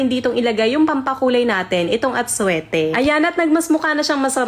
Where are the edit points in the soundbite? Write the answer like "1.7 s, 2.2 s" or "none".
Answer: none